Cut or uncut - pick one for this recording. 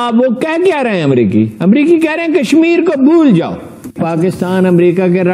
cut